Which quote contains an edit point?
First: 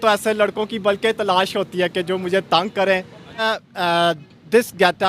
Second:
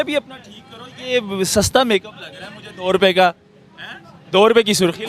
first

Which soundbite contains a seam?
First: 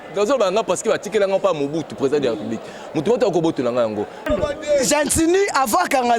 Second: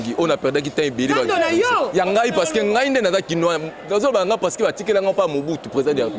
first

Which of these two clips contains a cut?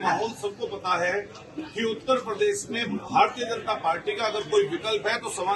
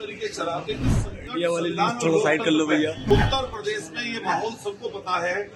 second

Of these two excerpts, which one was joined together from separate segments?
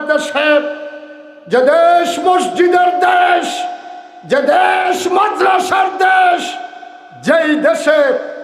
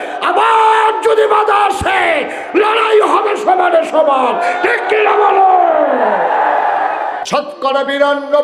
second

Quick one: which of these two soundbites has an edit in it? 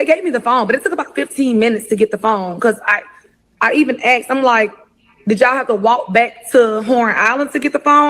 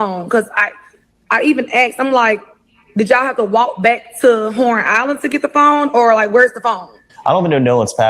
second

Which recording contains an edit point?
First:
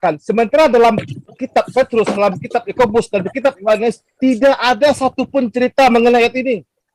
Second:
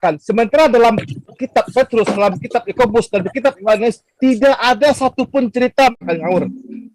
second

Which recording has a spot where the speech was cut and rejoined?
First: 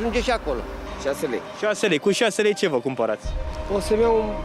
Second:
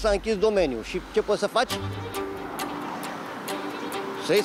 first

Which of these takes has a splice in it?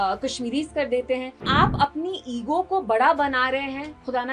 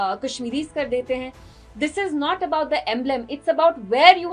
first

